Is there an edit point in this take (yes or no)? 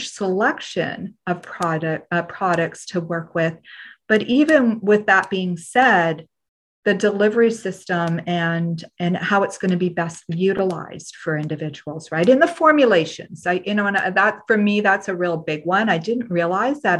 no